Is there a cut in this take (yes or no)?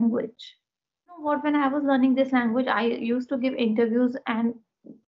yes